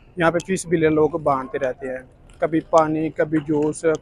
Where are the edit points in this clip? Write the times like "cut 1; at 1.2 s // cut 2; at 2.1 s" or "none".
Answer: none